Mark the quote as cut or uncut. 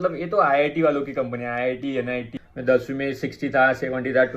cut